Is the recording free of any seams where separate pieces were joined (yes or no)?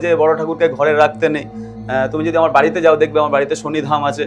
yes